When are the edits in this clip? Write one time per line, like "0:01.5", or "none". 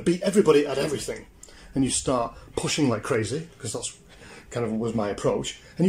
none